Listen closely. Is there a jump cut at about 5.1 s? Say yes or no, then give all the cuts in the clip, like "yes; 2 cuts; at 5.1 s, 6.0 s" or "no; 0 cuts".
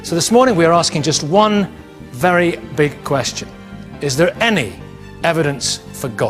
yes; 1 cut; at 5.1 s